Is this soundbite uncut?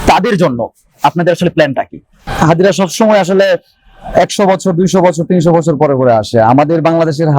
no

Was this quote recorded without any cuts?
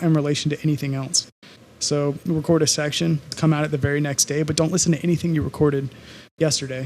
no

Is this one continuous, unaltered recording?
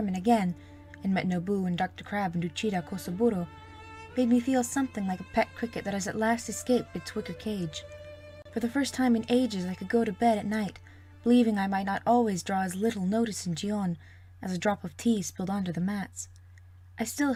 yes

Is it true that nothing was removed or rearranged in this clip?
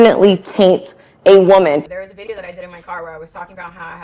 no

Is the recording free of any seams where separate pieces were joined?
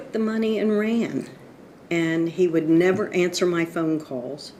yes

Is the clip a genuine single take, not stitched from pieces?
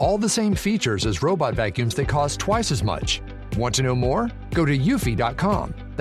yes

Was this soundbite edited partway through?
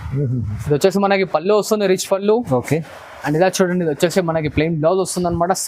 no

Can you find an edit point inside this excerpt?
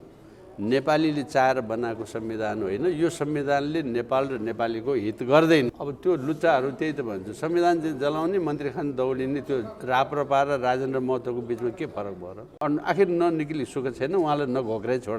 yes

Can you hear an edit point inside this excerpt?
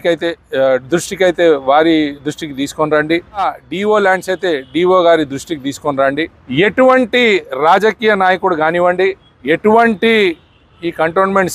yes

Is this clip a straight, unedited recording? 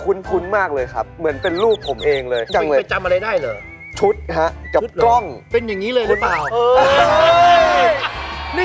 yes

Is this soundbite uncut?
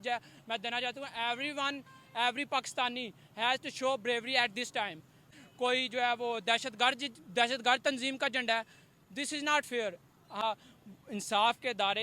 no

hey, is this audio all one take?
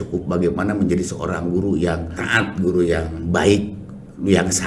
no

